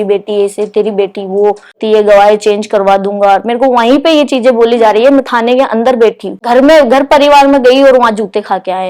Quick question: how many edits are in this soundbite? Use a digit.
2